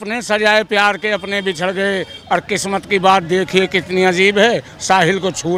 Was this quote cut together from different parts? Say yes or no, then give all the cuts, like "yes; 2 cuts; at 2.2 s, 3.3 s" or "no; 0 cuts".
no; 0 cuts